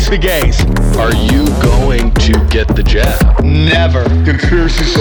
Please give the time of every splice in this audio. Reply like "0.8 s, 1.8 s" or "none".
none